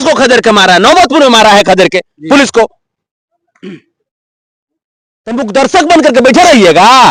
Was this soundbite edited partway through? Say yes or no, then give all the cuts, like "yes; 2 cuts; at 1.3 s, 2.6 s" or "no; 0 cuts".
no; 0 cuts